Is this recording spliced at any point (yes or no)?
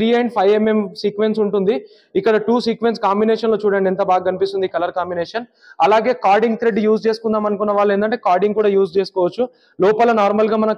no